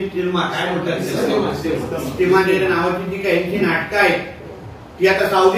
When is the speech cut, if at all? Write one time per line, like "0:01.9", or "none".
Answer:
none

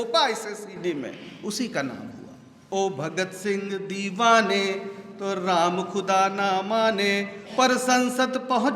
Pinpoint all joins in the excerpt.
0:02.5

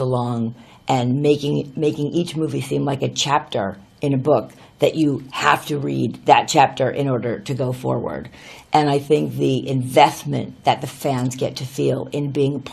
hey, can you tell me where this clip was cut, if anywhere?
0:05.6

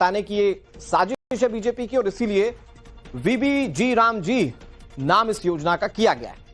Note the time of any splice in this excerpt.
none

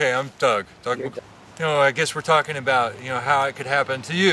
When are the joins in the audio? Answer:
0:01.2

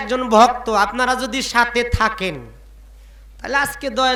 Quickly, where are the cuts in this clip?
none

